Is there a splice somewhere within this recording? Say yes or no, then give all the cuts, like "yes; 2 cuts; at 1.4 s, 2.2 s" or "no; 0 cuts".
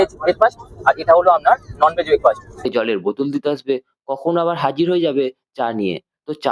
yes; 1 cut; at 2.6 s